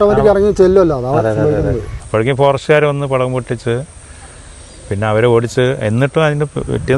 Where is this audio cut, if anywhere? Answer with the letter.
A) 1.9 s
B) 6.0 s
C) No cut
A